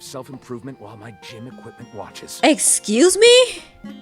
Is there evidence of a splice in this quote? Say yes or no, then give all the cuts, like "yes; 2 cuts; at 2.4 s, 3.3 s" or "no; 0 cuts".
no; 0 cuts